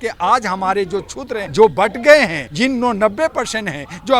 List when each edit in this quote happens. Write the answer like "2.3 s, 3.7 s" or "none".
1.4 s, 2.4 s